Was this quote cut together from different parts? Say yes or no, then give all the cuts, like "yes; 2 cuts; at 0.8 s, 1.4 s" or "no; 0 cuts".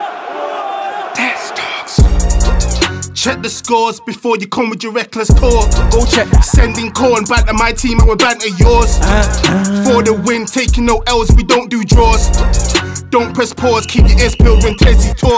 no; 0 cuts